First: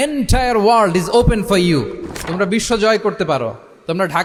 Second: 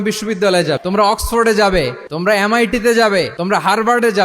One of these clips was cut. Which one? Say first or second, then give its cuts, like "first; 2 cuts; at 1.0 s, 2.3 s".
second; 3 cuts; at 0.8 s, 2.0 s, 3.4 s